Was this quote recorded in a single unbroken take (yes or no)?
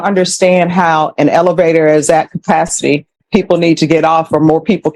yes